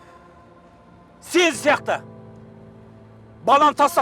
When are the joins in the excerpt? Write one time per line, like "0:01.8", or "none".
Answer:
0:01.3